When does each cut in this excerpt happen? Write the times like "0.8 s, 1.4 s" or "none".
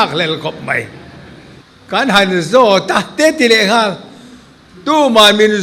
2.0 s